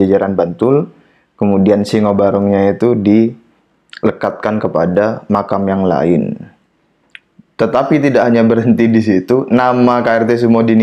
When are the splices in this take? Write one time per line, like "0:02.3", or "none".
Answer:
none